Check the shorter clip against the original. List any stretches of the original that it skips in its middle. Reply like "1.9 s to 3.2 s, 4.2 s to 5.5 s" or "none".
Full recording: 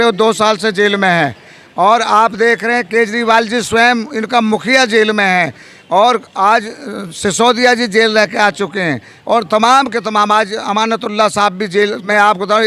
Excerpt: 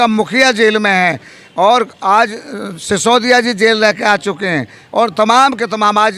none